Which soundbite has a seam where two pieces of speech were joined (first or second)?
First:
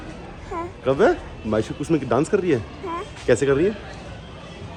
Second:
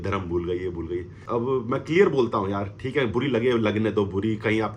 second